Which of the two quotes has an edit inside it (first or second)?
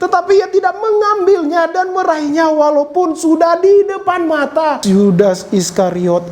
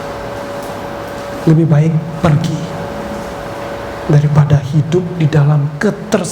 first